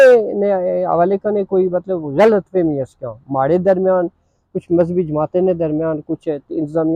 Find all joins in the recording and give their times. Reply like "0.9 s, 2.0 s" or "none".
none